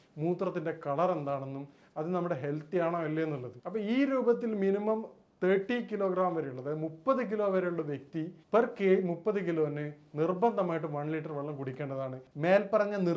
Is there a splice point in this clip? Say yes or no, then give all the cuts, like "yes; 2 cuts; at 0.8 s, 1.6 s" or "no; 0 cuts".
yes; 1 cut; at 12.2 s